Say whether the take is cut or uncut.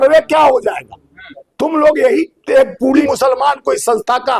cut